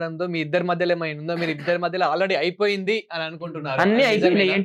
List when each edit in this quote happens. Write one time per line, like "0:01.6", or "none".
none

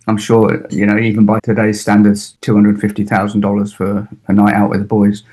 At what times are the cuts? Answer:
0:01.4
0:02.3

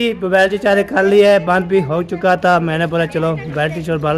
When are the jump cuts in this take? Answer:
none

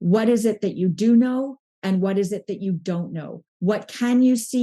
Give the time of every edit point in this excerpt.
none

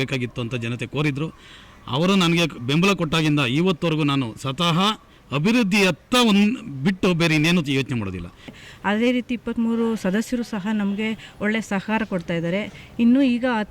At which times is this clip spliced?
0:08.5

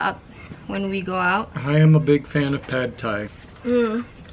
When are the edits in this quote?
0:03.3

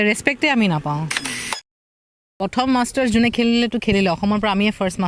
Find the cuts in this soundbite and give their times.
0:01.8

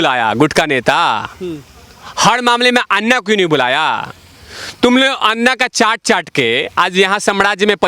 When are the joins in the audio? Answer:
none

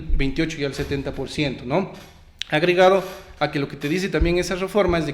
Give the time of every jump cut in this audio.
none

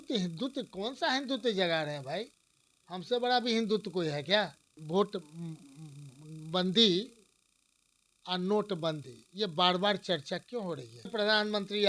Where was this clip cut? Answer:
0:04.8
0:11.1

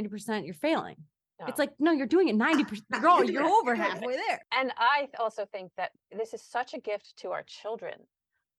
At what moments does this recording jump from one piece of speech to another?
0:04.4

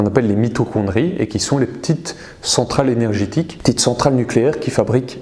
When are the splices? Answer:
0:03.5

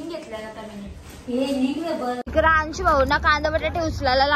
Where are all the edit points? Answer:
0:02.2

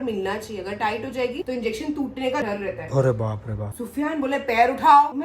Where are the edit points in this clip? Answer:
0:03.7

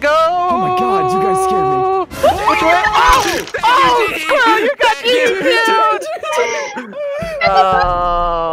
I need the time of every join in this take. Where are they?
0:07.6

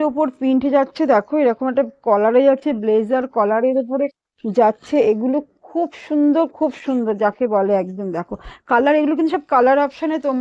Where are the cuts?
none

